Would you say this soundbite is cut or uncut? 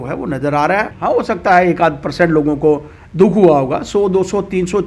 cut